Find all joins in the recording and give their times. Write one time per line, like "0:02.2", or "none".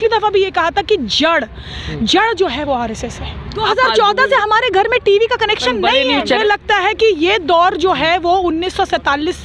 0:03.5
0:06.4